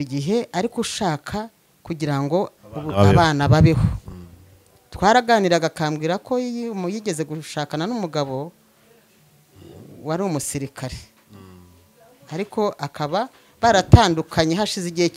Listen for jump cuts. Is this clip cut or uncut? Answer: uncut